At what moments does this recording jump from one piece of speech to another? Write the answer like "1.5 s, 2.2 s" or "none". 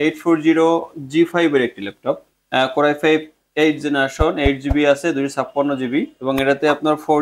2.3 s, 3.4 s, 6.1 s